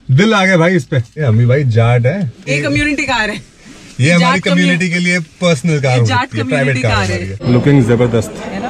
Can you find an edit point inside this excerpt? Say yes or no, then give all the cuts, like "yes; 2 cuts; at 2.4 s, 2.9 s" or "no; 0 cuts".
yes; 3 cuts; at 1.1 s, 2.5 s, 7.3 s